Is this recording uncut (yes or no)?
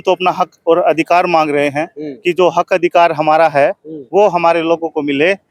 yes